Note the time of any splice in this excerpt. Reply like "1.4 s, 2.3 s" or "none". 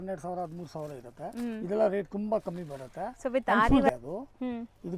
3.9 s